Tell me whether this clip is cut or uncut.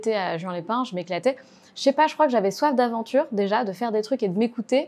uncut